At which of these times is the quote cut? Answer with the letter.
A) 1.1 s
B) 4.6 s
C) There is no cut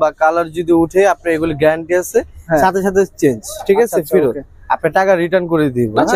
C